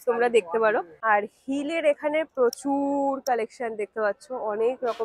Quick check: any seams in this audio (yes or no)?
yes